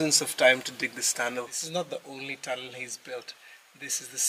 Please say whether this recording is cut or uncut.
cut